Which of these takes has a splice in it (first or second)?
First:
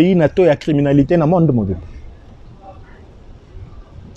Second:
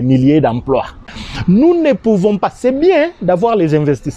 second